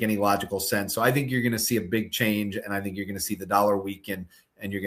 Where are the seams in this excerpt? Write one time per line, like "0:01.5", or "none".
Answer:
none

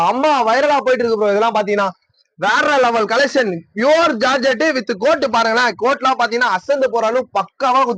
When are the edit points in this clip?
none

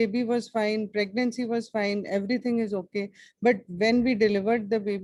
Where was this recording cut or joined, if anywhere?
none

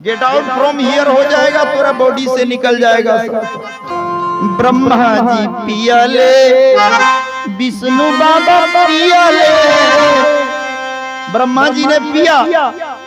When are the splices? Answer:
0:03.9

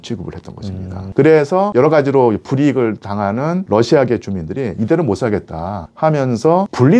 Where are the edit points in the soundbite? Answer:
none

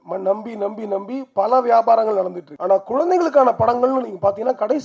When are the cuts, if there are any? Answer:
0:02.5

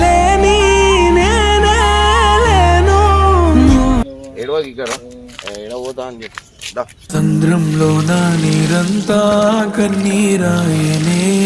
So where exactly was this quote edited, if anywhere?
none

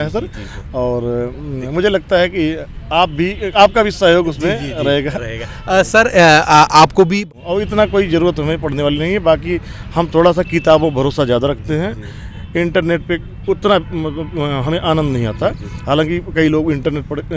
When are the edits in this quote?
0:07.2

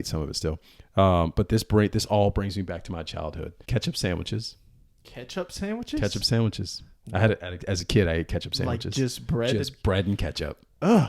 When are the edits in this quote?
0:03.6

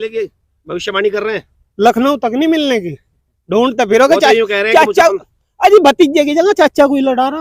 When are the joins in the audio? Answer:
none

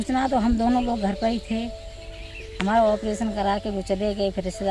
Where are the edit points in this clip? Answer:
none

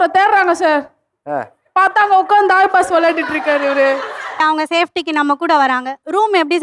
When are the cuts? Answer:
0:04.4

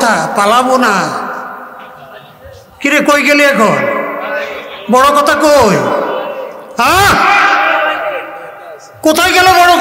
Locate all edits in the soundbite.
none

